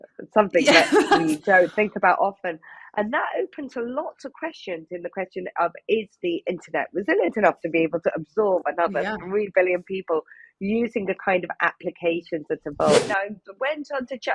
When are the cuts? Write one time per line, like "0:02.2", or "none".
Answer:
0:13.1